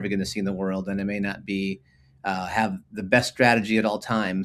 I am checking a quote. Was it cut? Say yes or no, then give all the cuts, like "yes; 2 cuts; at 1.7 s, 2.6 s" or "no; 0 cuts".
no; 0 cuts